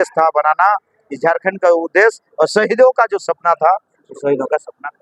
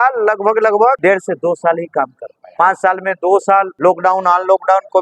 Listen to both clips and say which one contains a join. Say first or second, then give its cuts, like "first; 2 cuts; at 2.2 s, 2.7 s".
second; 3 cuts; at 1.0 s, 2.4 s, 3.7 s